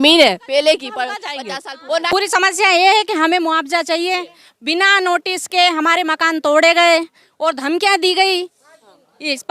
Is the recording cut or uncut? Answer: cut